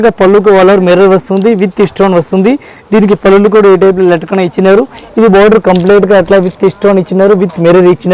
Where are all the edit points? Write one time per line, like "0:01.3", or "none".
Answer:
none